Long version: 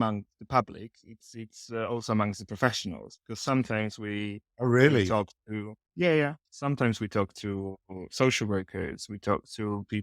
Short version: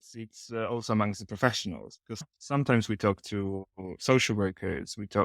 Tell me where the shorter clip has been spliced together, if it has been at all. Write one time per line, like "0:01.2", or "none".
0:02.2